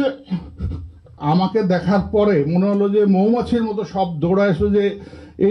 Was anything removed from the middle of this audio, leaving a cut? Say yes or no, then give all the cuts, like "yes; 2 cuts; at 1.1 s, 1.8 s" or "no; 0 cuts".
yes; 1 cut; at 1.2 s